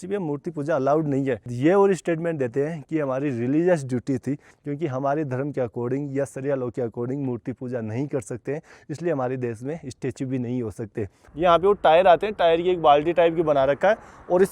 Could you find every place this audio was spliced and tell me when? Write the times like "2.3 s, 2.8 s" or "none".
1.4 s, 4.5 s, 11.2 s